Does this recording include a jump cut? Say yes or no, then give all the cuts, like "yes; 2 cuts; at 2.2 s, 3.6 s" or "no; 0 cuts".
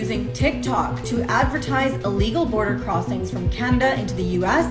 no; 0 cuts